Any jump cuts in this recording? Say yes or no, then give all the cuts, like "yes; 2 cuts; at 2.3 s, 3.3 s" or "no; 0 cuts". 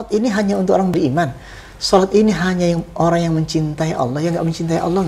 yes; 1 cut; at 0.9 s